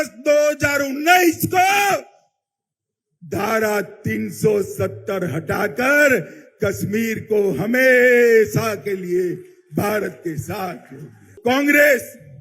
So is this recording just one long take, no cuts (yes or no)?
no